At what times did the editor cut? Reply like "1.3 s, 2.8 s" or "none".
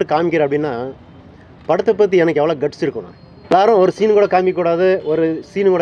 3.5 s

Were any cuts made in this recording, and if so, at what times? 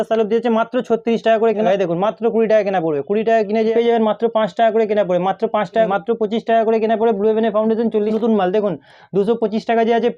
1.7 s, 3.7 s, 5.9 s, 8.1 s

